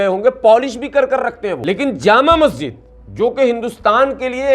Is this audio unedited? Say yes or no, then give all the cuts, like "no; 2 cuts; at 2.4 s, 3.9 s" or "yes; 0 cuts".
no; 1 cut; at 1.5 s